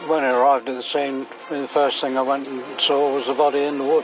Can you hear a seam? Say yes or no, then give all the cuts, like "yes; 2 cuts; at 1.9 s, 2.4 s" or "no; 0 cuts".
no; 0 cuts